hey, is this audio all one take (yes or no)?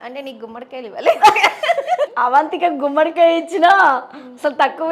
no